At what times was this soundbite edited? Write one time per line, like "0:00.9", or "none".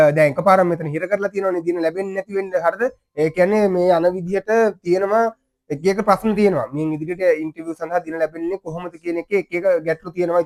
none